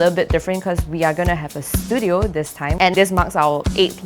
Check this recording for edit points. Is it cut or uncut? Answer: cut